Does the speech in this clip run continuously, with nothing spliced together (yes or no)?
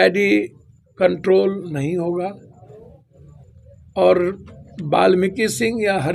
yes